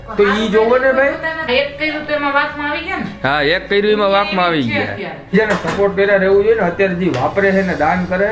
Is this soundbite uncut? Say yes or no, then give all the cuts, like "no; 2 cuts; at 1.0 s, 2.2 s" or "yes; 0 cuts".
no; 2 cuts; at 1.4 s, 5.3 s